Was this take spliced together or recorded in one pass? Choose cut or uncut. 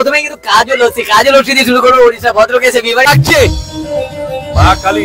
cut